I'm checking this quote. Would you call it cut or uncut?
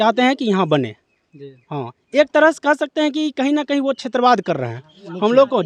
uncut